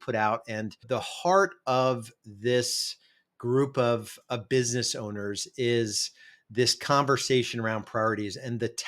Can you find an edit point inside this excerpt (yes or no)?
yes